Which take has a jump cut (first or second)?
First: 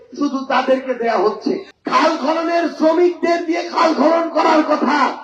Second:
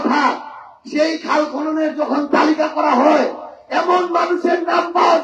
first